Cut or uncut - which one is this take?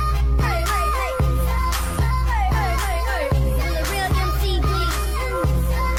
uncut